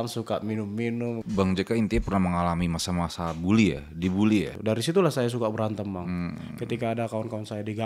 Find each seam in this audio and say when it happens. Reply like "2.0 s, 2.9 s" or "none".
1.2 s, 4.5 s

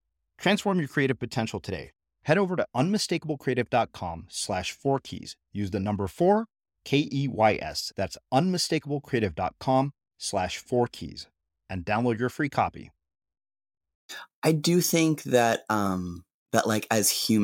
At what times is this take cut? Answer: 14.1 s

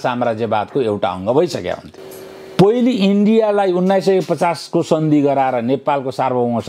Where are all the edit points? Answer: 1.9 s

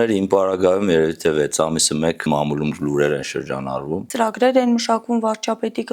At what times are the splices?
2.3 s, 4.0 s

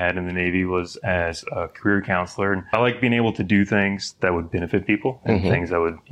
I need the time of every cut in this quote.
none

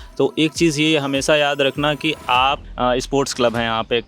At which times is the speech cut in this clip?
2.7 s

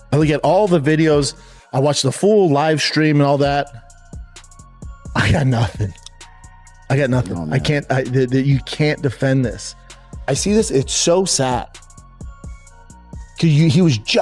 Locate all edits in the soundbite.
none

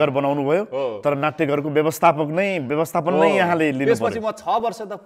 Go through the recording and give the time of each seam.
none

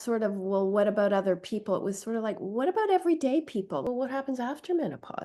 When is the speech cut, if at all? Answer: 3.9 s

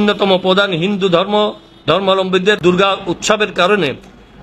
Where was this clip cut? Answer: 2.6 s

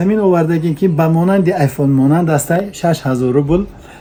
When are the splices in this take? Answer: none

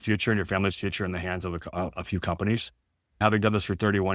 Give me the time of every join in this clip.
3.2 s

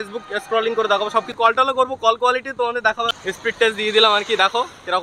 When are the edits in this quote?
1.3 s, 3.2 s

